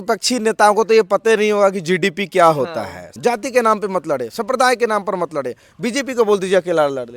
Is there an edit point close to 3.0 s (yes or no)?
yes